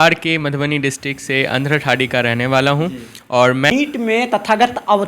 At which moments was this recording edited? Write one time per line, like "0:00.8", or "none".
0:03.7